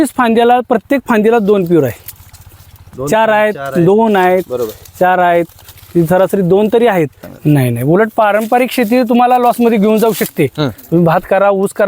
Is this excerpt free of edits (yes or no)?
no